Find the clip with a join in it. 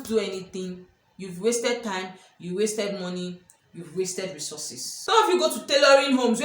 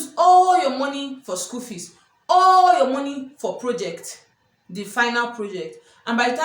first; 1 cut; at 5.0 s

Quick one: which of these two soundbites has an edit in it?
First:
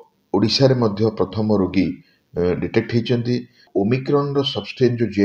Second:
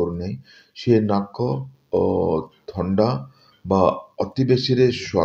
first; 1 cut; at 3.6 s

